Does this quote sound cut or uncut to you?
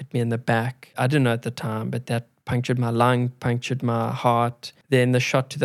cut